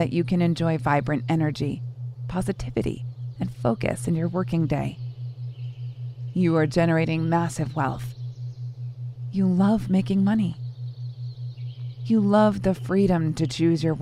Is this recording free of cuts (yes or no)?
yes